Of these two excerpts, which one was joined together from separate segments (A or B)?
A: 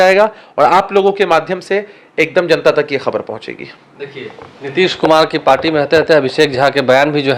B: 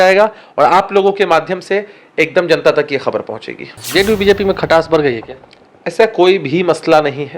B